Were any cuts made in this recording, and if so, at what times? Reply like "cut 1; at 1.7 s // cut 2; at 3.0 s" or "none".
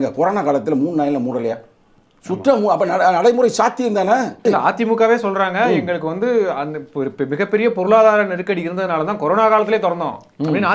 cut 1; at 4.4 s

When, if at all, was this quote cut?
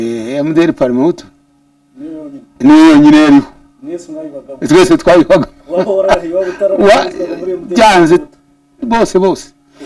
none

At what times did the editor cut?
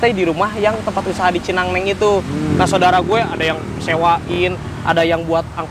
none

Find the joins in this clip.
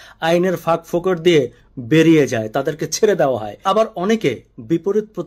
cut 1; at 3.6 s

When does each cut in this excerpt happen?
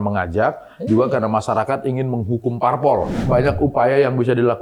cut 1; at 3.1 s

